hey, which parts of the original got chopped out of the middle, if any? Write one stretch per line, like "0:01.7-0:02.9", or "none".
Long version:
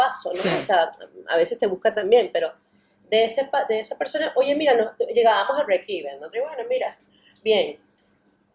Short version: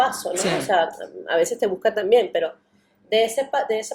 none